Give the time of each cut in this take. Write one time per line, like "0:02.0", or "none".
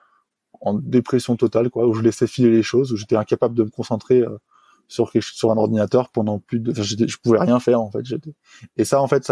none